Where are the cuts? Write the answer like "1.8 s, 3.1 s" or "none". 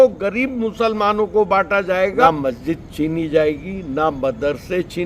2.3 s